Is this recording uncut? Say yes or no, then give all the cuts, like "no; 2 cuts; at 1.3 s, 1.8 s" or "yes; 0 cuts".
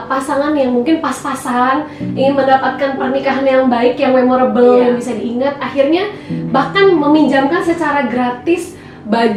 yes; 0 cuts